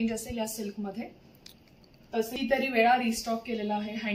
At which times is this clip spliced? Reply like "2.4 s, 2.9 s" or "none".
2.3 s